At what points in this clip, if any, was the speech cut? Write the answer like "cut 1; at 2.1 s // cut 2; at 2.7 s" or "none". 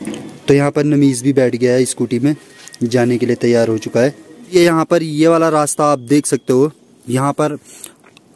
cut 1; at 4.5 s